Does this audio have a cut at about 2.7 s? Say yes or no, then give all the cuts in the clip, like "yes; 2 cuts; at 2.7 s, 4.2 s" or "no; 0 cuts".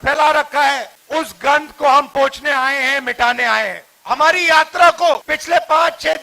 no; 3 cuts; at 0.9 s, 3.9 s, 5.3 s